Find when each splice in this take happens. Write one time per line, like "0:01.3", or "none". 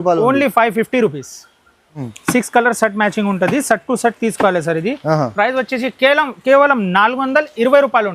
0:02.1